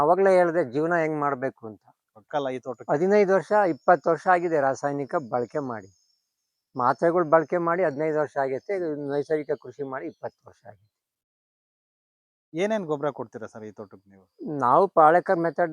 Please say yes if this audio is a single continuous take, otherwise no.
no